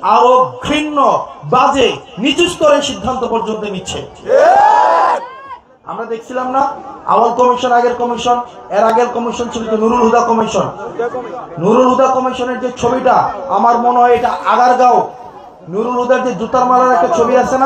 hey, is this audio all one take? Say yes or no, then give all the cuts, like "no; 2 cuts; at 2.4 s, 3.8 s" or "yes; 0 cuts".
yes; 0 cuts